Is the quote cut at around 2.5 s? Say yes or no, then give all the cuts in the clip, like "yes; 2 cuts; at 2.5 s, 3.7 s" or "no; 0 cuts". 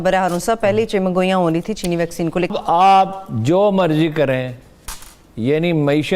yes; 1 cut; at 2.5 s